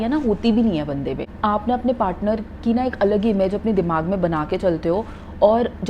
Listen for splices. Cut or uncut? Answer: cut